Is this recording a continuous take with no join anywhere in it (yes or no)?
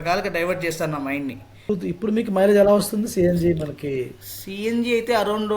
no